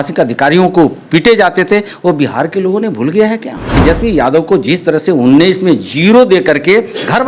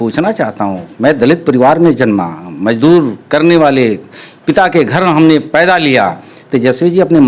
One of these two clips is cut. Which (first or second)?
first